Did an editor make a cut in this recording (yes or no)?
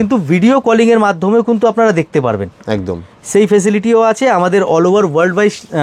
no